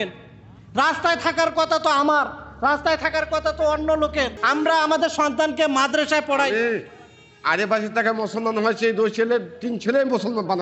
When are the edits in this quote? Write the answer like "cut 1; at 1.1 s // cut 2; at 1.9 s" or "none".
cut 1; at 4.4 s